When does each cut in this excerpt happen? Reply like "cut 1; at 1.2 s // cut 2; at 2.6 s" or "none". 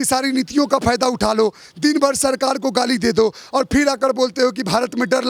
none